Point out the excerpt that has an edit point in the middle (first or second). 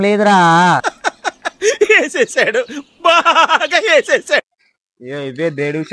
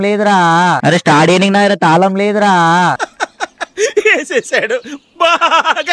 second